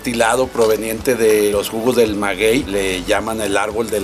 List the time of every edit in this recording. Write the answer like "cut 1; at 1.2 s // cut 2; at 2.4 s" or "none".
cut 1; at 1.5 s // cut 2; at 2.7 s